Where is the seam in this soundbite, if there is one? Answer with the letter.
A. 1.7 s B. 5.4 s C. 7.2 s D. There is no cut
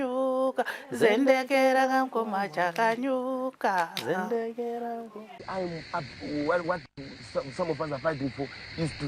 B